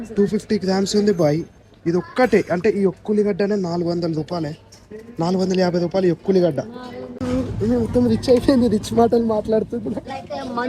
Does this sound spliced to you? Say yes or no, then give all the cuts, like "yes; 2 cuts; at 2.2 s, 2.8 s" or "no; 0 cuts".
yes; 1 cut; at 7.2 s